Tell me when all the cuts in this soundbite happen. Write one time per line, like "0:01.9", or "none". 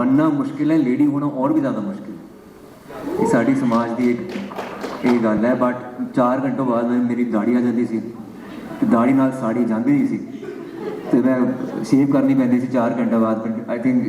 none